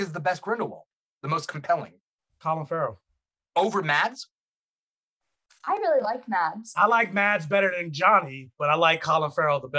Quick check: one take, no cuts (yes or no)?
yes